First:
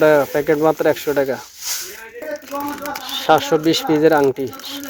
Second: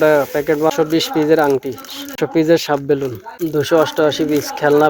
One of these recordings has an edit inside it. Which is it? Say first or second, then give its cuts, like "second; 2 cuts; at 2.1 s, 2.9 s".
second; 3 cuts; at 0.7 s, 2.1 s, 3.2 s